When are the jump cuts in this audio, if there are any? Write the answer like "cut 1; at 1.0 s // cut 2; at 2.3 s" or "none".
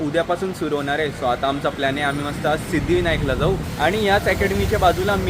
cut 1; at 3.7 s